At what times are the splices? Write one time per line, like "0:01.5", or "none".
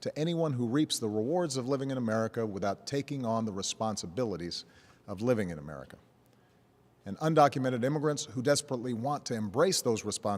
0:04.2